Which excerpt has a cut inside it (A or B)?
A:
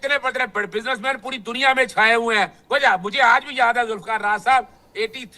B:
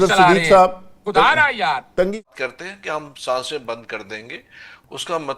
B